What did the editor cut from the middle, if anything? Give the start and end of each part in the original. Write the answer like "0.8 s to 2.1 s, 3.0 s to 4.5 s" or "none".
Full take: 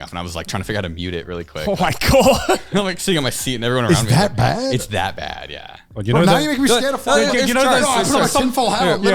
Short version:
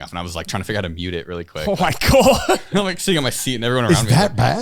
none

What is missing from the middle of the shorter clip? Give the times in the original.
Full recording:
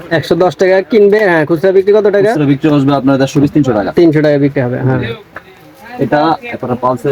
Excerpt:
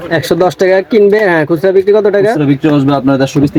none

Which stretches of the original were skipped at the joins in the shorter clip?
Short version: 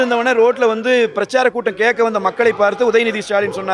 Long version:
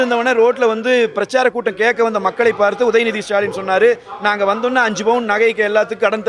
none

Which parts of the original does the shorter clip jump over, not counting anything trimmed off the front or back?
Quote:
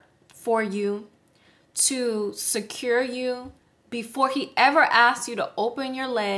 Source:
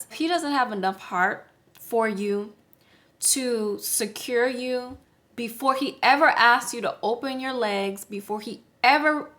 none

